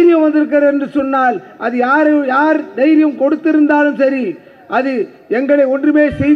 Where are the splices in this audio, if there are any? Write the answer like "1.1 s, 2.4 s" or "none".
none